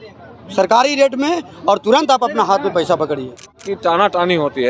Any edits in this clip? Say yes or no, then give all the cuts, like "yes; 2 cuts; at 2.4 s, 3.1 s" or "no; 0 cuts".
yes; 1 cut; at 3.6 s